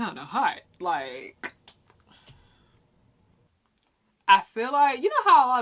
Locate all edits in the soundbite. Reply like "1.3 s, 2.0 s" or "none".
3.5 s